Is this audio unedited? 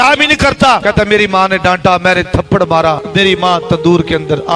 no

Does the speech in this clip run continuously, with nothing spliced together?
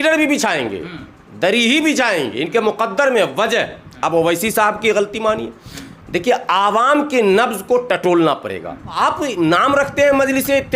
no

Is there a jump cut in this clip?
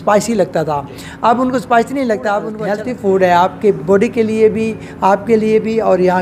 yes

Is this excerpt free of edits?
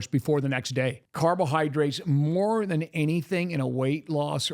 no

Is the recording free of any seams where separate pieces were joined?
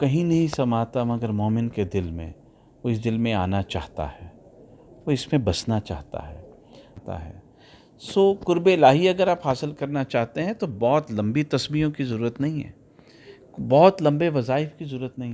no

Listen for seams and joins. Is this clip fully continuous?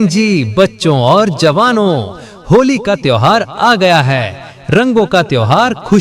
no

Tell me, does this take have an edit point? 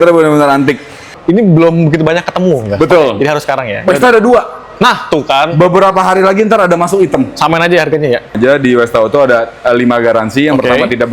yes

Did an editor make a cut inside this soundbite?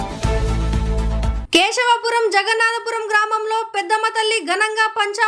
yes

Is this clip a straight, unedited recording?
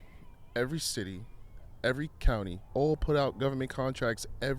no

